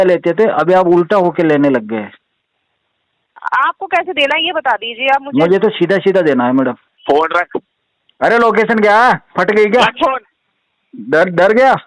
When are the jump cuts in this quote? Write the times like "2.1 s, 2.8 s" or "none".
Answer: 6.9 s